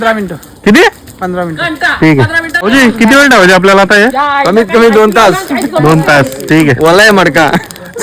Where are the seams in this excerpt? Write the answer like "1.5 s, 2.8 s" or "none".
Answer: 2.5 s